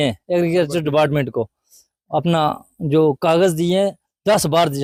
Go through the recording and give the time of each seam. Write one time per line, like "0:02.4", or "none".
none